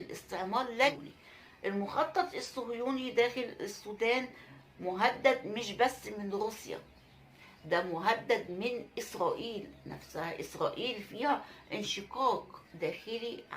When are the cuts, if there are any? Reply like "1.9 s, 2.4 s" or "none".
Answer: 1.0 s